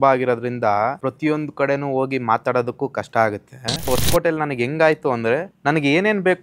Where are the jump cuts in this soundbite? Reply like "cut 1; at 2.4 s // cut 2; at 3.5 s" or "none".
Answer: cut 1; at 1.0 s // cut 2; at 3.9 s // cut 3; at 5.5 s